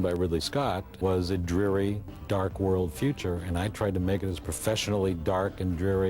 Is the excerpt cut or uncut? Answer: cut